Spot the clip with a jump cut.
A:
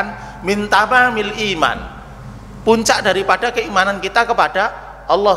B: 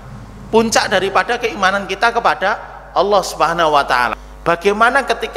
B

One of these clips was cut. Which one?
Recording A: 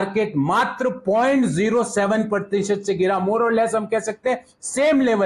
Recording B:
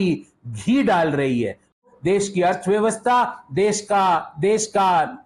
B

